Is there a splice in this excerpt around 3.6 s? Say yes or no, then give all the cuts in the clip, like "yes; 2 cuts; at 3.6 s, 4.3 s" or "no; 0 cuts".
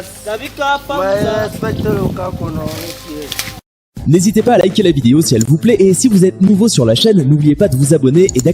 yes; 1 cut; at 3.6 s